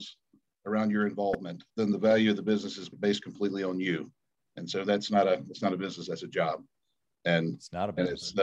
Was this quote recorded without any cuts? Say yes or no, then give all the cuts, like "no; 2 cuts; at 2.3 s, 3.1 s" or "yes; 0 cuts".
no; 2 cuts; at 1.8 s, 3.0 s